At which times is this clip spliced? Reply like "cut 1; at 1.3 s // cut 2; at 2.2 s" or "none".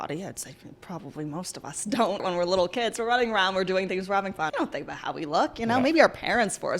cut 1; at 2.2 s // cut 2; at 4.5 s